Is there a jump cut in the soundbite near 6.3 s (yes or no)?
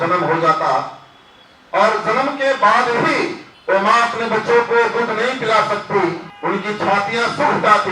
yes